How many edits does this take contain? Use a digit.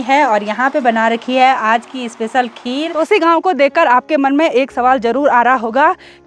1